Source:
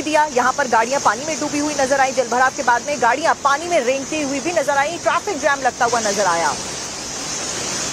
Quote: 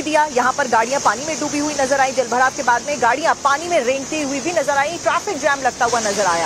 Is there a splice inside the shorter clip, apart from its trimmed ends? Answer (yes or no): no